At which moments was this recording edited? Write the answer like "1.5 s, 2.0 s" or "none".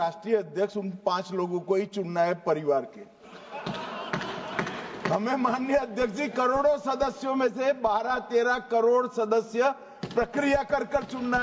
none